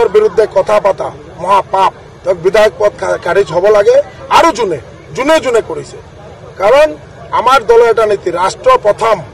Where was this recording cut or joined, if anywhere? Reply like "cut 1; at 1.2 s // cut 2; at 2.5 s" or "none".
cut 1; at 2.1 s